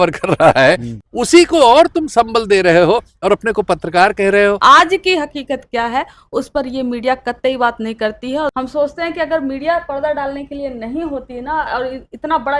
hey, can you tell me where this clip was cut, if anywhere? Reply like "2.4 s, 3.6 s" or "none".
0.9 s, 4.6 s, 8.5 s